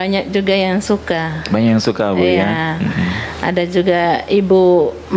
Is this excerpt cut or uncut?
uncut